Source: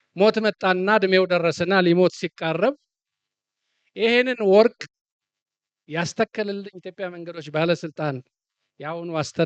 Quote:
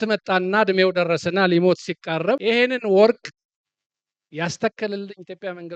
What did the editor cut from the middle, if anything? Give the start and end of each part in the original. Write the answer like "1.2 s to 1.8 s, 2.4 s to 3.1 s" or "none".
2.8 s to 4.0 s